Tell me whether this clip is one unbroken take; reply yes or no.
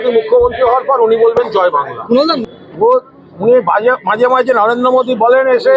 no